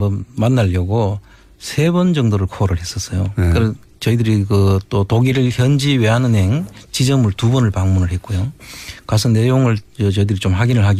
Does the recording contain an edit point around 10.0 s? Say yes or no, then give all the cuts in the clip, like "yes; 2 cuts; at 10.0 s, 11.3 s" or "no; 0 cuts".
no; 0 cuts